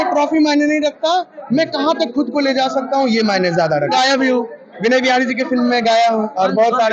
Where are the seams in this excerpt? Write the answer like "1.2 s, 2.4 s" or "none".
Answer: 3.9 s